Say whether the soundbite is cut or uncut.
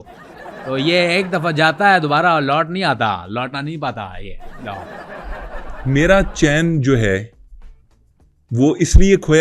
cut